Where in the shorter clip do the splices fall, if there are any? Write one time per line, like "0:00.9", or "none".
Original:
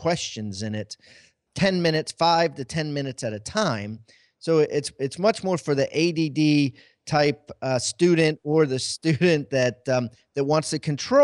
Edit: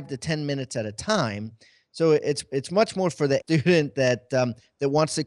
0:03.4